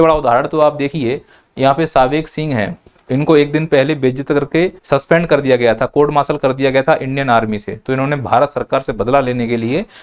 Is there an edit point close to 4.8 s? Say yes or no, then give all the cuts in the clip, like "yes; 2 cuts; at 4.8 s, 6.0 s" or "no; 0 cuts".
yes; 1 cut; at 4.8 s